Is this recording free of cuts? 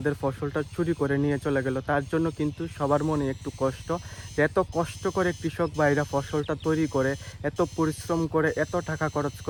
yes; 0 cuts

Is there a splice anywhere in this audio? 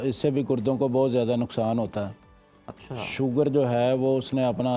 no; 0 cuts

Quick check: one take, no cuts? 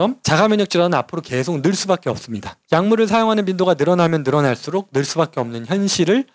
yes; 0 cuts

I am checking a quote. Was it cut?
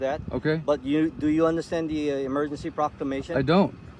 no; 0 cuts

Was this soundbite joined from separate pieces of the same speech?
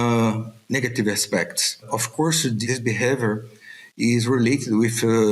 yes; 1 cut; at 2.2 s

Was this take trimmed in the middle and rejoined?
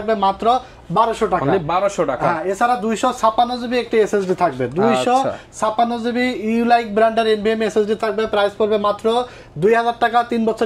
no; 0 cuts

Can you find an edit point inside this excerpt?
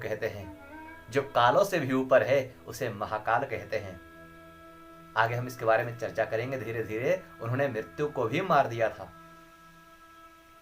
no; 0 cuts

